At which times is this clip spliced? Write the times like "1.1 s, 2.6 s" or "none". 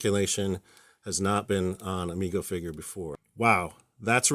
3.2 s